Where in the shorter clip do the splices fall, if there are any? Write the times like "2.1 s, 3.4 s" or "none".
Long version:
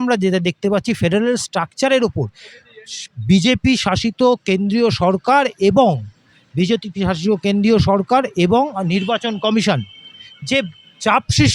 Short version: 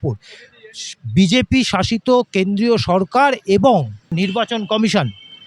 4.1 s